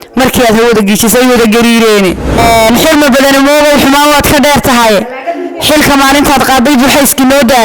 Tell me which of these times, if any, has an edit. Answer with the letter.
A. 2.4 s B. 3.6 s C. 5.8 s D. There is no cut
A